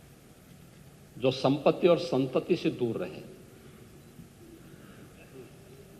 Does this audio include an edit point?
no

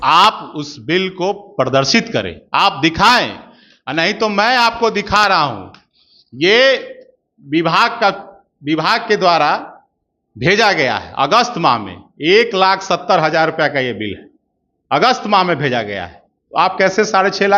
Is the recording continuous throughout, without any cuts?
yes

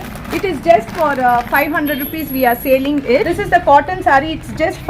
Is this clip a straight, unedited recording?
no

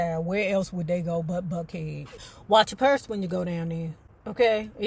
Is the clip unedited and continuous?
yes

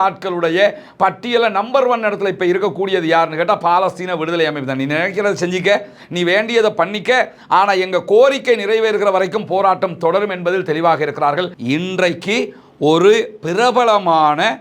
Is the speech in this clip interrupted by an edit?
yes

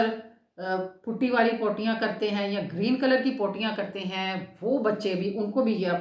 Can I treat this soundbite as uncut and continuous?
yes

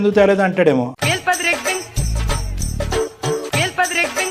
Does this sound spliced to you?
no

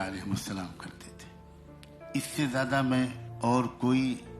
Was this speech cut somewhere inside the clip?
yes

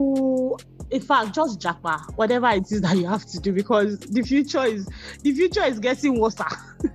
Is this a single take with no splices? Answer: yes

